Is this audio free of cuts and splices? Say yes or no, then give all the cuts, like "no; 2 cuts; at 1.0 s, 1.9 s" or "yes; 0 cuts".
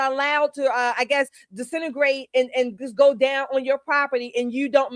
yes; 0 cuts